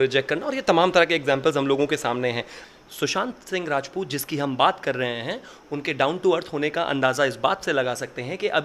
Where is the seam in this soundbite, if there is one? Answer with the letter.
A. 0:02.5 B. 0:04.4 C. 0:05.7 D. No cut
A